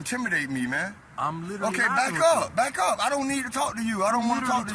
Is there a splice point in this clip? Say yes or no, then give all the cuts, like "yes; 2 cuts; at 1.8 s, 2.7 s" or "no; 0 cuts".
no; 0 cuts